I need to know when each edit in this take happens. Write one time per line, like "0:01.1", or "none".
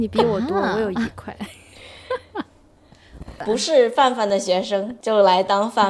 0:03.3
0:04.9